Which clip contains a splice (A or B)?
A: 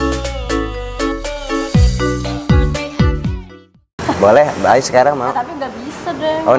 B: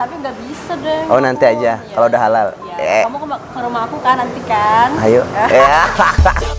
A